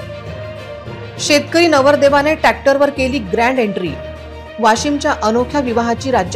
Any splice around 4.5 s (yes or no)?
no